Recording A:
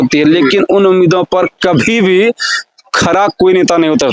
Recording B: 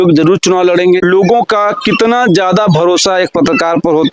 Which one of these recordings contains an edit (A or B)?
B